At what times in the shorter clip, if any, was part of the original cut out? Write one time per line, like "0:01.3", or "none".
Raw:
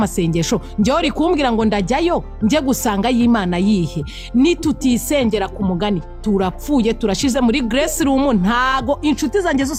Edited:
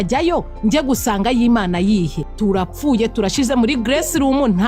0:02.3